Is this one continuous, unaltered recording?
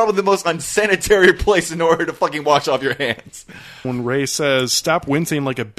no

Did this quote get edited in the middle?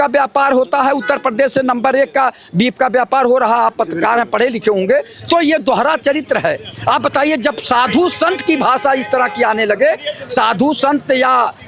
no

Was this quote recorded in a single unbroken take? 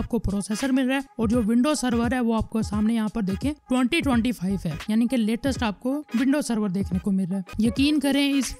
no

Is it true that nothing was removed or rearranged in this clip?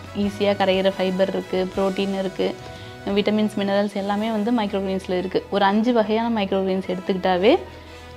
yes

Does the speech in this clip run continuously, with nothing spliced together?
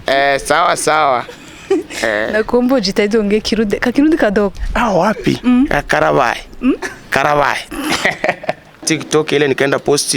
no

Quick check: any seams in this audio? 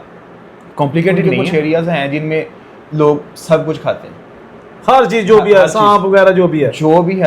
yes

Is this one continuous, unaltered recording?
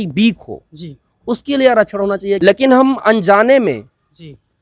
no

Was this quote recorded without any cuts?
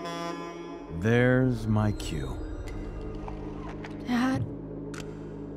yes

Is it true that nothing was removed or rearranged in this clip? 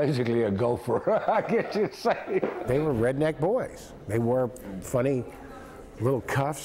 no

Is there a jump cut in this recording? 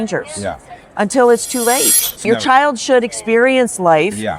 yes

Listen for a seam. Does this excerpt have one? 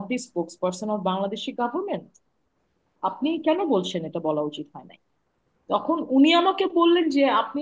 no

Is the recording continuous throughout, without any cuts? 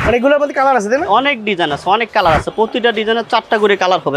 yes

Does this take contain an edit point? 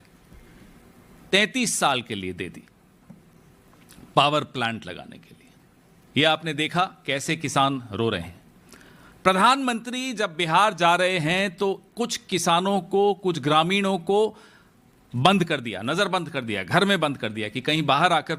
no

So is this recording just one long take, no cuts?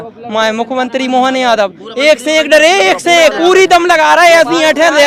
yes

